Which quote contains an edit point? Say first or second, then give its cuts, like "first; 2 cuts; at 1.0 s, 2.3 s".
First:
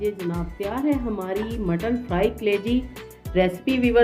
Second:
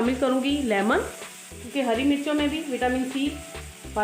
second; 1 cut; at 1.7 s